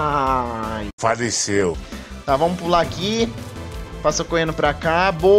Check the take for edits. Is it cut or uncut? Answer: uncut